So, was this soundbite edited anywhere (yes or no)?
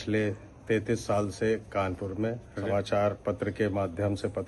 yes